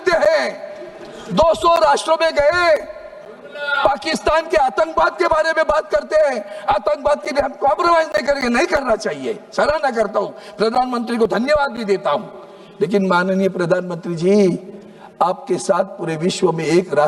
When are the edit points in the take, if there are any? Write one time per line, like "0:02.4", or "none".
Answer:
none